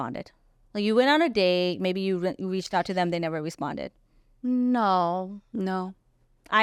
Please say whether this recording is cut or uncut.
uncut